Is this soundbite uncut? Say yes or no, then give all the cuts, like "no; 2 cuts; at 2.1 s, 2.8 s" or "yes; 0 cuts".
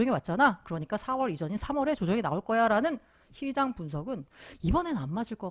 yes; 0 cuts